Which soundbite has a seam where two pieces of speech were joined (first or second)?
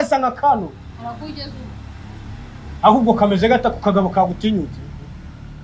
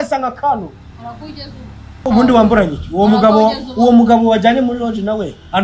second